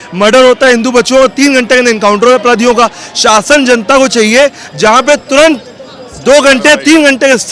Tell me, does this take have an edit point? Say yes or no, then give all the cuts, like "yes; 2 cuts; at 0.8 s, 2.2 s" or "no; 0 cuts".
no; 0 cuts